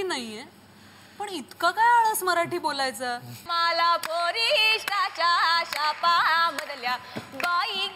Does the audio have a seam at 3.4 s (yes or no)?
yes